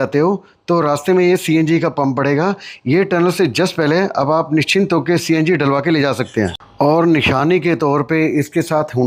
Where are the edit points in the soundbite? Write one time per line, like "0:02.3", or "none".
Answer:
none